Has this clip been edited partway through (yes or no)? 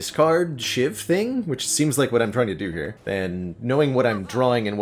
no